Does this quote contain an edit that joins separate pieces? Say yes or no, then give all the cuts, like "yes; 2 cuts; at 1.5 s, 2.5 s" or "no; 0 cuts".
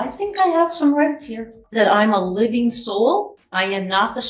yes; 2 cuts; at 1.6 s, 3.4 s